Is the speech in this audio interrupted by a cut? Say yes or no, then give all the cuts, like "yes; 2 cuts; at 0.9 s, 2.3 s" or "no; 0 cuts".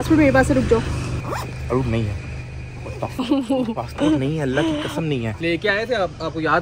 yes; 2 cuts; at 1.0 s, 5.3 s